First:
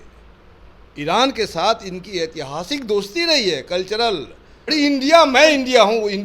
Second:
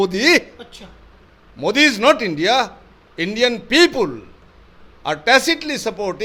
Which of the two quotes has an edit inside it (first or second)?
first